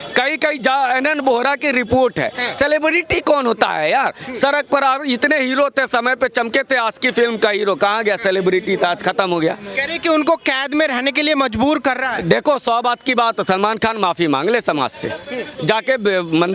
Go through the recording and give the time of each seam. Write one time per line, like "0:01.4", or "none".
none

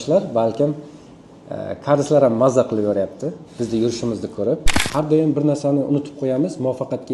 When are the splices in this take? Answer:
0:04.8

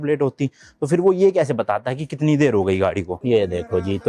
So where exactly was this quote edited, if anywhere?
0:03.1

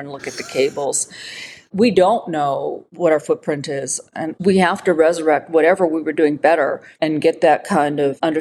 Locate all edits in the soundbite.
0:06.9

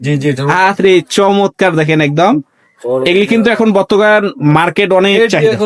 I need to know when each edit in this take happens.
none

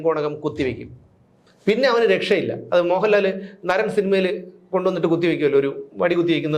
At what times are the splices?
none

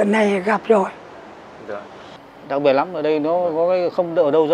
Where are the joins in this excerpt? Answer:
0:02.2

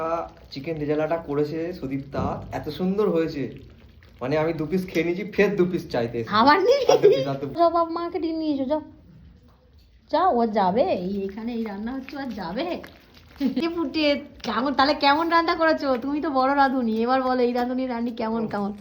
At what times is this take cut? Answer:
0:07.6
0:13.6

